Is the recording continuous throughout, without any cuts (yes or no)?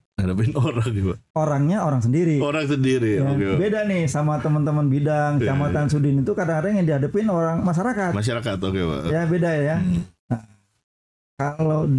yes